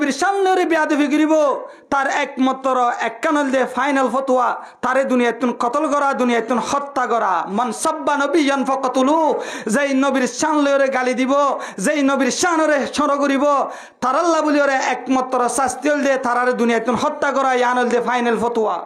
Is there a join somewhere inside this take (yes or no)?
no